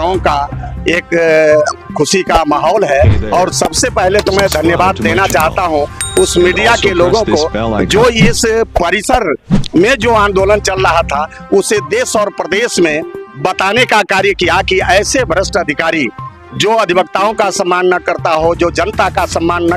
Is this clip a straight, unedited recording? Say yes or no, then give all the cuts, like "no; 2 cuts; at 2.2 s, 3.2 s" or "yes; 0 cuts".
yes; 0 cuts